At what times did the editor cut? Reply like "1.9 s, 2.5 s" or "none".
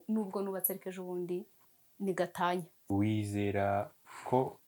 2.9 s